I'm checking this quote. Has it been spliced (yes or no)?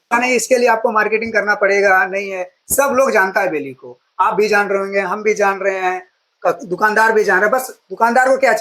no